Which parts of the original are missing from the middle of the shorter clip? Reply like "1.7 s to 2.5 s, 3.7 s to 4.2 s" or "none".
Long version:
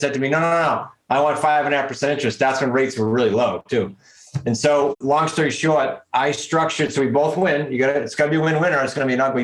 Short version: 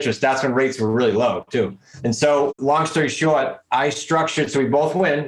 4.0 s to 4.3 s